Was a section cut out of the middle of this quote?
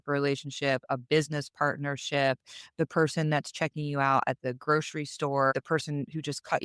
yes; 1 cut; at 5.5 s

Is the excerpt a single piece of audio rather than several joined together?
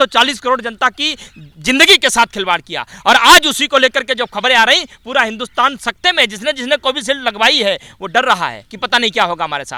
yes; 0 cuts

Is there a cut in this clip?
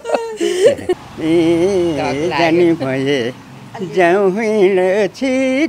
yes; 1 cut; at 1.0 s

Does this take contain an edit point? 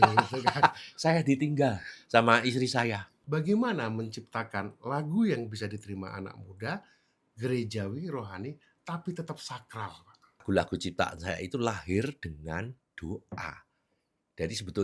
yes; 2 cuts; at 3.1 s, 10.4 s

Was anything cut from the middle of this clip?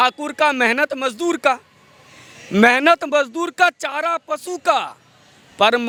no; 0 cuts

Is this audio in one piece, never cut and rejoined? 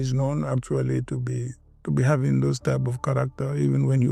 yes; 0 cuts

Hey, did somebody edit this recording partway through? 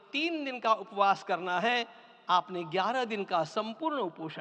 no; 0 cuts

